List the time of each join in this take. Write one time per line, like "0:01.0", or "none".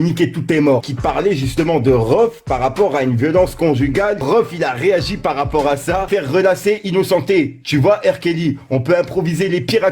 0:00.9
0:04.2
0:06.1